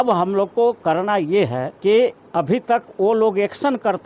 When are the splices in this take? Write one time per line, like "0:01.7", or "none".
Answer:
0:01.7
0:02.2